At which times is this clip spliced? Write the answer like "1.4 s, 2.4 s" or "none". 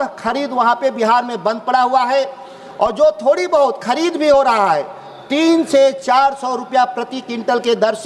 none